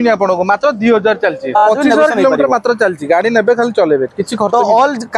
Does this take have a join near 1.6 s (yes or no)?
yes